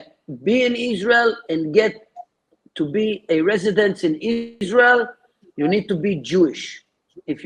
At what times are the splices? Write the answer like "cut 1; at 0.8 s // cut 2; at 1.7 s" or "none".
cut 1; at 4.5 s